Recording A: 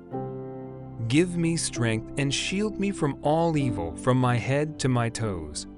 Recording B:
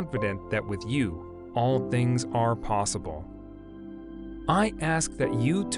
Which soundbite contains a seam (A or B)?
A